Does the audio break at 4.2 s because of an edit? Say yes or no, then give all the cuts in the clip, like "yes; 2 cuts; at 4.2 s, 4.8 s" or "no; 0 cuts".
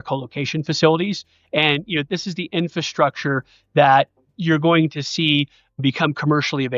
yes; 3 cuts; at 2.1 s, 4.2 s, 5.8 s